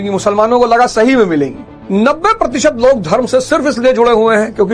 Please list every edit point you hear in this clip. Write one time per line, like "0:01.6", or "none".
0:01.7